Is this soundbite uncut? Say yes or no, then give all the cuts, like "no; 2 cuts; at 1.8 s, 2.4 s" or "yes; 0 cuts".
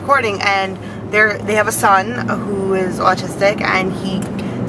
no; 1 cut; at 3.2 s